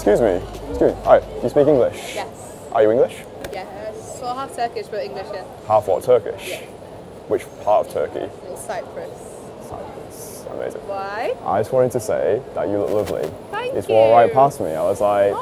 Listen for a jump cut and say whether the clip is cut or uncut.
uncut